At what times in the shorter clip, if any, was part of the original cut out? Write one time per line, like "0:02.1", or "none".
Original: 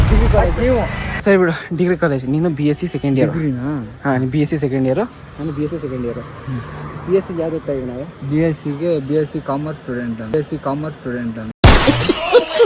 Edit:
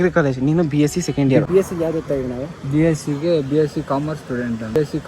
0:01.5